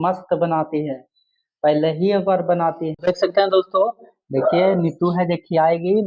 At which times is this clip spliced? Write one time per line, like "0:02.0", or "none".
0:03.0

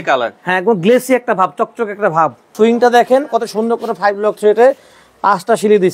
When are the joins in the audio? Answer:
0:02.5

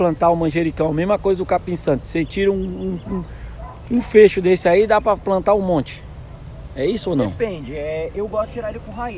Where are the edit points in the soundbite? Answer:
none

